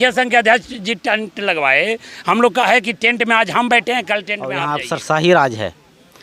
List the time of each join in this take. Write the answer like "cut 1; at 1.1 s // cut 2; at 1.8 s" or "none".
cut 1; at 4.6 s